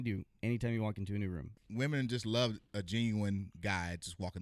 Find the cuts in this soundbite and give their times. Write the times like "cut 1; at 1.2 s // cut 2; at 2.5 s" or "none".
cut 1; at 1.6 s